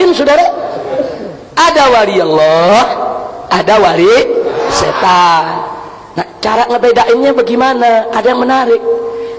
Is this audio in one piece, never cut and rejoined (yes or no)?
yes